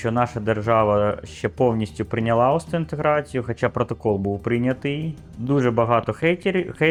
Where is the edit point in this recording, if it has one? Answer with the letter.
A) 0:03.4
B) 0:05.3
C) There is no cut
C